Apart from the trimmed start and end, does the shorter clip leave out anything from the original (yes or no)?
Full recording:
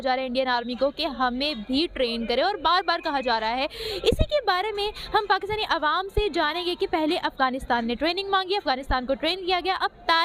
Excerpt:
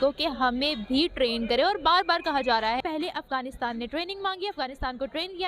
yes